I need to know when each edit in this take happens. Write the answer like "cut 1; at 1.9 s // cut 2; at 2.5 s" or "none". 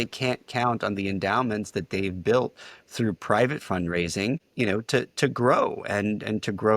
cut 1; at 4.5 s